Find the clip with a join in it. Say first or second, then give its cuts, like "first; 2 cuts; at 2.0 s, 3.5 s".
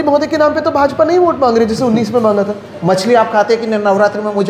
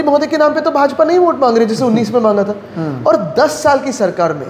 first; 1 cut; at 2.7 s